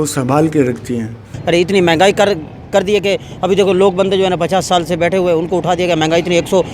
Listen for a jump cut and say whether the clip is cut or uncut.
cut